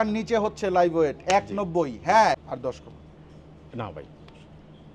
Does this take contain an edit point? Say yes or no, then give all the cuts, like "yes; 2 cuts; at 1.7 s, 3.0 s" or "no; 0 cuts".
yes; 1 cut; at 2.4 s